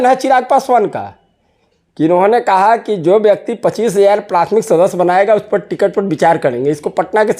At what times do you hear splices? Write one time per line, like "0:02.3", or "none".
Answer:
none